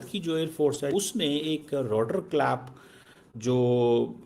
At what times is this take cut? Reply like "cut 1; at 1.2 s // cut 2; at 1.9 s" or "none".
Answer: cut 1; at 0.9 s

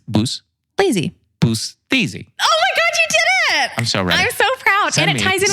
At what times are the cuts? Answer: cut 1; at 2.2 s

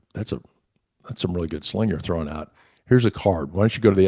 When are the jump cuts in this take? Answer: none

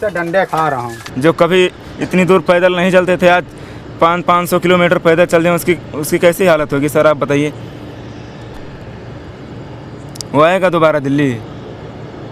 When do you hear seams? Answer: cut 1; at 1.0 s

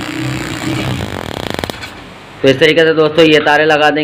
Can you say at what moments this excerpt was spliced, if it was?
cut 1; at 2.3 s

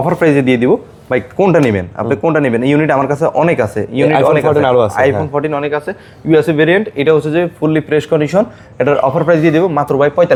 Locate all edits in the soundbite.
none

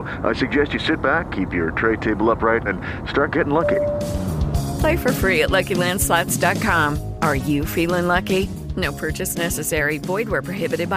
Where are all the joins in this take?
none

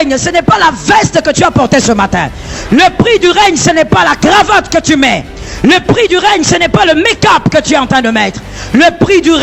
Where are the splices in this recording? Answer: none

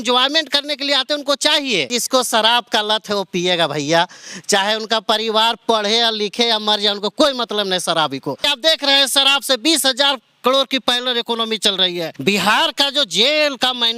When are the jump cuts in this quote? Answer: cut 1; at 2.0 s // cut 2; at 8.5 s // cut 3; at 12.1 s

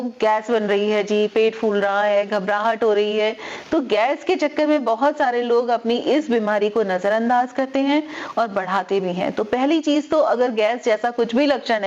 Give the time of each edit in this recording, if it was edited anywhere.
none

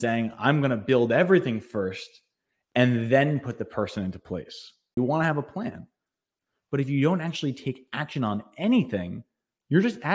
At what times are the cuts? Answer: cut 1; at 4.9 s

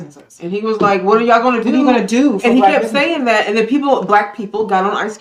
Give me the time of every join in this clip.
none

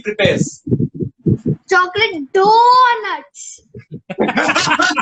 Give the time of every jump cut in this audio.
none

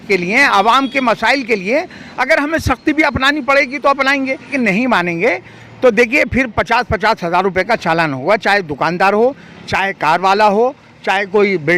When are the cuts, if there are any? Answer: cut 1; at 4.5 s

